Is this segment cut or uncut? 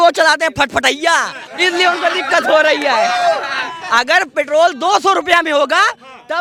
uncut